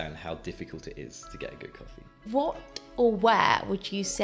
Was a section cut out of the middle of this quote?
yes; 1 cut; at 2.1 s

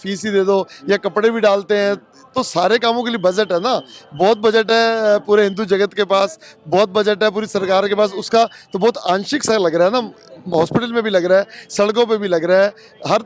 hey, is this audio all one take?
yes; 0 cuts

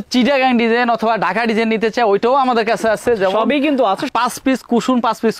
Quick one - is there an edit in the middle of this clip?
yes; 1 cut; at 4.1 s

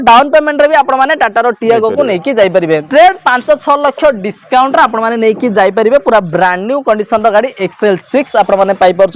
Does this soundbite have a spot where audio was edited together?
yes; 1 cut; at 2.8 s

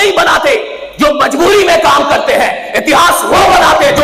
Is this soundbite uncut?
yes; 0 cuts

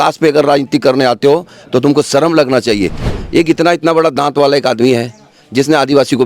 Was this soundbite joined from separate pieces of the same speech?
yes; 1 cut; at 3.0 s

